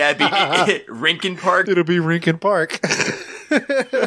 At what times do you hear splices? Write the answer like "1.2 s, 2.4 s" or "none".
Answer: 1.6 s